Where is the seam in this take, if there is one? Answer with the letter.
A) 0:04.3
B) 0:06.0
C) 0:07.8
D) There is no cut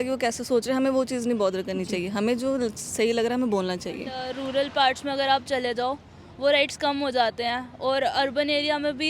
A